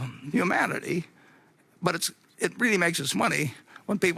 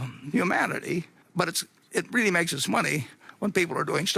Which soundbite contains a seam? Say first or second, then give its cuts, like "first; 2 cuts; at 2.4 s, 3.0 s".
second; 1 cut; at 1.2 s